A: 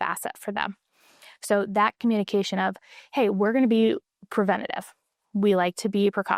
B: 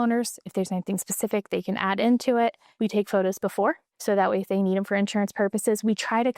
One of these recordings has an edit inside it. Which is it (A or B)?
B